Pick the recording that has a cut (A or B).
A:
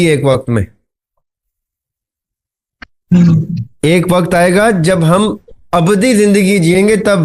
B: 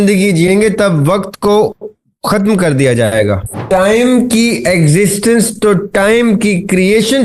B